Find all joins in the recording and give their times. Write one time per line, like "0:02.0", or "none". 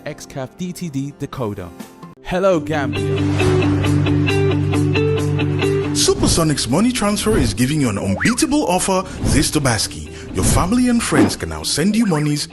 0:02.9

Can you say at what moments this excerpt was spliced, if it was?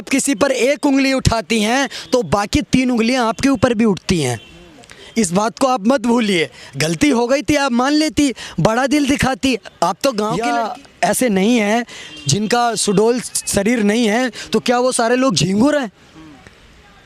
0:10.4

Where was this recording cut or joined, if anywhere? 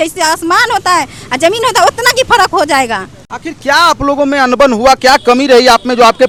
none

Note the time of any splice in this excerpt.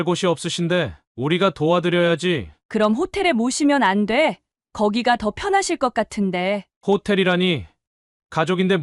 none

